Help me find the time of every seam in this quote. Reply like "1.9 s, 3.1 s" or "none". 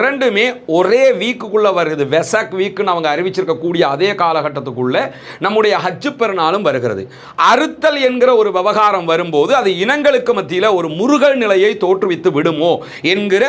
7.3 s

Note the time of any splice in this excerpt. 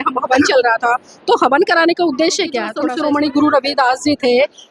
2.7 s

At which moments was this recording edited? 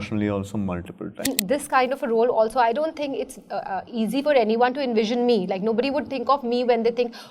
1.2 s

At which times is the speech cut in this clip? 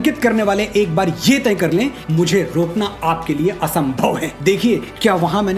2.0 s, 4.3 s

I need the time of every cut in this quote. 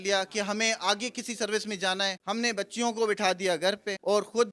none

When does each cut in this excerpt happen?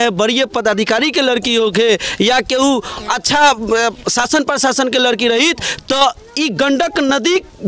none

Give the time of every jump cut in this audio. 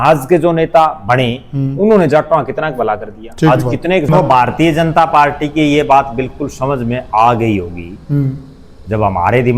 4.1 s

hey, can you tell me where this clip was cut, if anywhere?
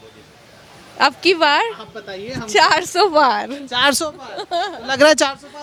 none

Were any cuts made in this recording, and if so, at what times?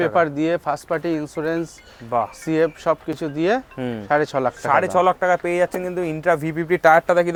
none

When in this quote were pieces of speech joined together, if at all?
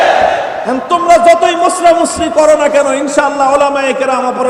none

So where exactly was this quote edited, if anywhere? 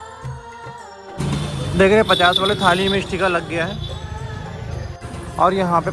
1.3 s

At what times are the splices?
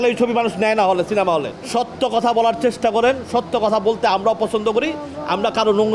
1.6 s

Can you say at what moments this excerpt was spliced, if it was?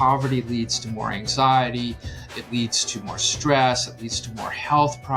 none

